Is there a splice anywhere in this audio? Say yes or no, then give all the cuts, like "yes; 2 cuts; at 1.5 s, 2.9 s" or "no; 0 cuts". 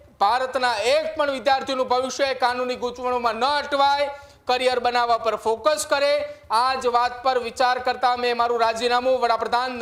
no; 0 cuts